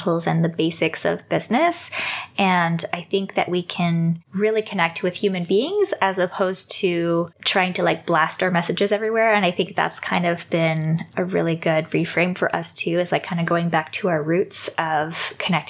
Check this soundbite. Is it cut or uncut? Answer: cut